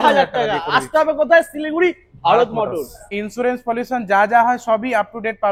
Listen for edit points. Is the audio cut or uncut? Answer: cut